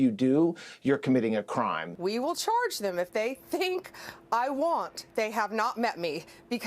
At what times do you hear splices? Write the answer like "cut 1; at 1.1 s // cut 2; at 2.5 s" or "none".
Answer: cut 1; at 1.9 s